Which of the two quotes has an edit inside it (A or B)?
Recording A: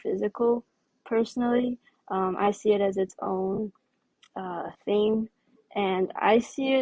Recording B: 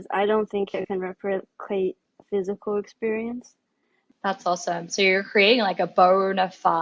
B